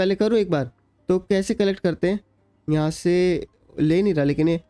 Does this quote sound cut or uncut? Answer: uncut